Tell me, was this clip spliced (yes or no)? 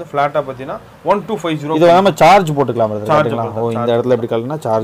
no